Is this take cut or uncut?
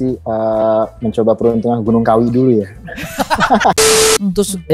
cut